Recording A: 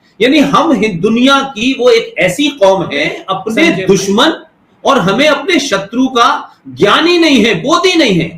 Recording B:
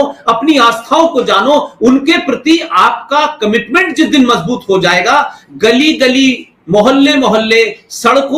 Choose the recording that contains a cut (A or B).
A